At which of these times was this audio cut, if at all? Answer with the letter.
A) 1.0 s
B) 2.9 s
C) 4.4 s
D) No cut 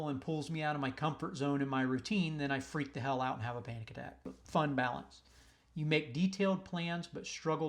C